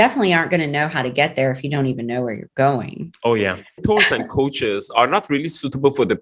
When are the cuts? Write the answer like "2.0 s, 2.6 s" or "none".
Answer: 3.8 s